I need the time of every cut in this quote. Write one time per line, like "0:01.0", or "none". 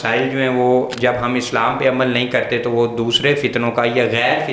none